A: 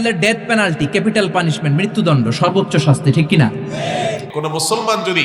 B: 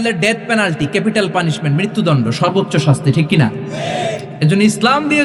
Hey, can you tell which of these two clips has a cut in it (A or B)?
A